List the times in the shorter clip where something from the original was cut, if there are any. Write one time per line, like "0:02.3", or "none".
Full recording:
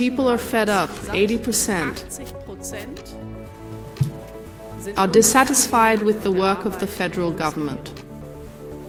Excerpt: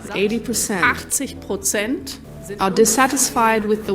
0:02.2